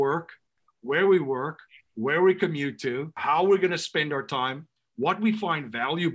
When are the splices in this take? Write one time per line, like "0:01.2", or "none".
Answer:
0:03.1